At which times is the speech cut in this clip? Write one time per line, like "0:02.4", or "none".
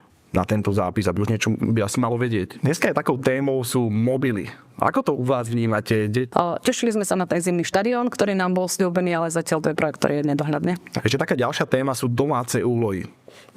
0:02.5
0:06.3
0:10.9